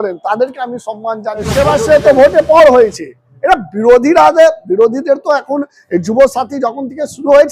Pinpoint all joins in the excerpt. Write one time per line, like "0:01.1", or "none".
0:01.4